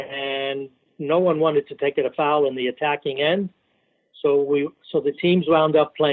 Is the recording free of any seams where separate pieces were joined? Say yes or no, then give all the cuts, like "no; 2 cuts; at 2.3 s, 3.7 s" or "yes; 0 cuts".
yes; 0 cuts